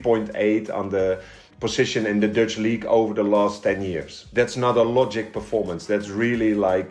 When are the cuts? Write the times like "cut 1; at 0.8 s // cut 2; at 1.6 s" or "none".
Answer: none